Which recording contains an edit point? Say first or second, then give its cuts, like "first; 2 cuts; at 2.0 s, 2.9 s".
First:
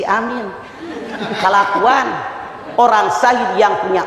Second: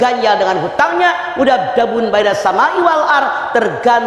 first; 1 cut; at 2.6 s